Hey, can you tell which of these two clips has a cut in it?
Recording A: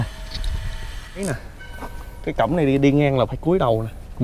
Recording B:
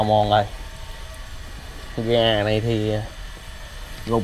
A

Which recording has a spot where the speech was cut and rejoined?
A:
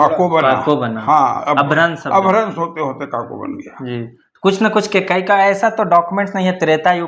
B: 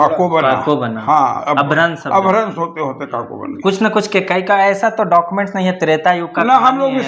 B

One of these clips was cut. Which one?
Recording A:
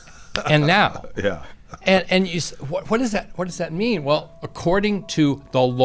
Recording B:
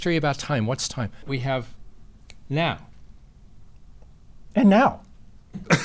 B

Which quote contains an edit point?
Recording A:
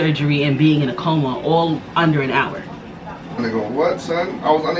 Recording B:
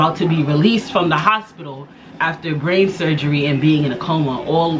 A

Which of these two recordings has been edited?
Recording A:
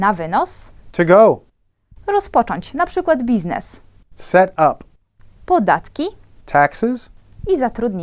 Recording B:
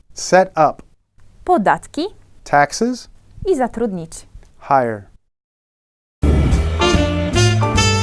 B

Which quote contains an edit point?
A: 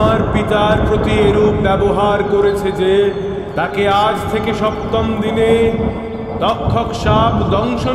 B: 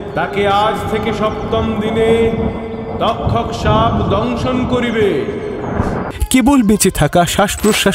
B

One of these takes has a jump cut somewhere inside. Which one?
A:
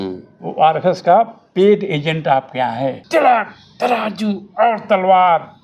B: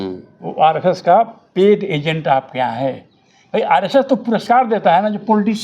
A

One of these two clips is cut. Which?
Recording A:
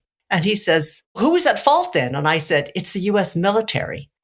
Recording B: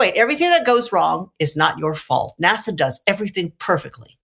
A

